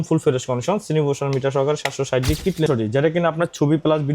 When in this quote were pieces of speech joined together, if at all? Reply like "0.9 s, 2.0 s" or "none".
2.7 s